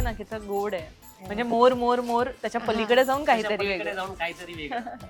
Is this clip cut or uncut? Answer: uncut